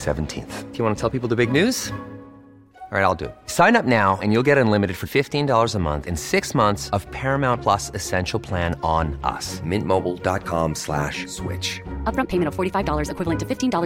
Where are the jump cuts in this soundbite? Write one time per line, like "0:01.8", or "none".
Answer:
none